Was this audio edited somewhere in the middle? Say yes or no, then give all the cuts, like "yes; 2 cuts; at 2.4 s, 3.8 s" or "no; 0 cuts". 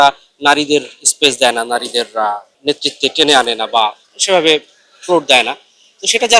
no; 0 cuts